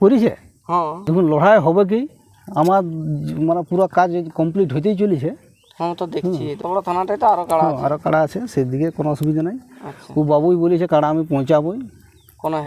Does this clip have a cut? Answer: yes; 2 cuts; at 1.0 s, 6.6 s

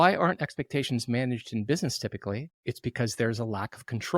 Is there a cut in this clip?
no; 0 cuts

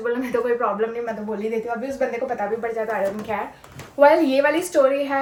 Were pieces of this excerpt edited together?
no; 0 cuts

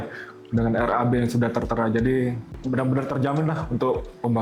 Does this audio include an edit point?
yes; 1 cut; at 2.5 s

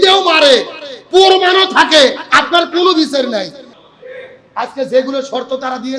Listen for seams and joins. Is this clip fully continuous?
no; 1 cut; at 3.7 s

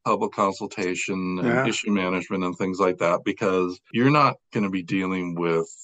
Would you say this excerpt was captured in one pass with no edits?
no; 1 cut; at 3.9 s

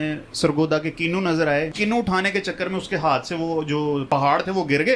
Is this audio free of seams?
no; 2 cuts; at 1.7 s, 4.0 s

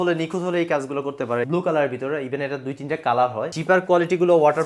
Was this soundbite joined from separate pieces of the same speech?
yes; 2 cuts; at 1.5 s, 3.6 s

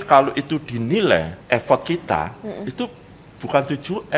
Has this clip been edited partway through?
yes; 1 cut; at 1.3 s

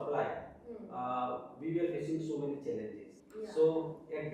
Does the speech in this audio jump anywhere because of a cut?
yes; 1 cut; at 3.1 s

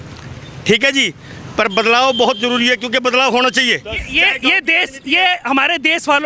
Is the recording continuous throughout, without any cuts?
yes; 0 cuts

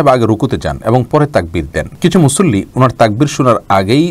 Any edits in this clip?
yes; 1 cut; at 1.8 s

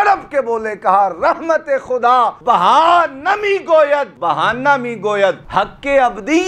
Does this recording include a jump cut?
yes; 3 cuts; at 2.4 s, 4.1 s, 5.4 s

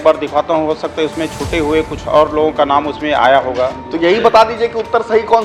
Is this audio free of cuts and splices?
yes; 0 cuts

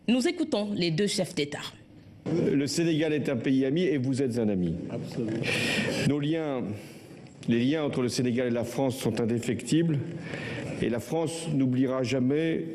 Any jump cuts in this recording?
yes; 1 cut; at 8.7 s

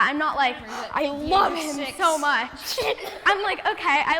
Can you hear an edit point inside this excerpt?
yes; 1 cut; at 3.2 s

